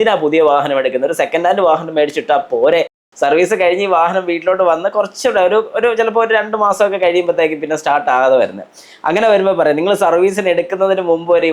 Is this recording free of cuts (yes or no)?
no